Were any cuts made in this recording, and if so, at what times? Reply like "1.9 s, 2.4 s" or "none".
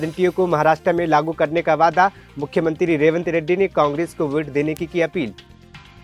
none